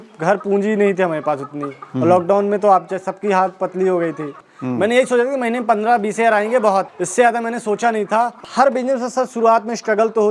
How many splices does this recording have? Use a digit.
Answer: 2